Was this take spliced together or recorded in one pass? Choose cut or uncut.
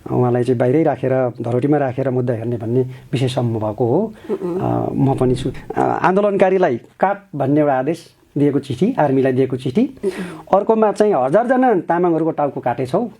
cut